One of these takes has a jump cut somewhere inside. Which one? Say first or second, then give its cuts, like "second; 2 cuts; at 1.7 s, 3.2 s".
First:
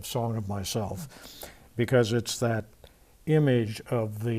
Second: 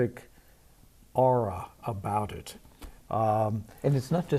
second; 1 cut; at 2.9 s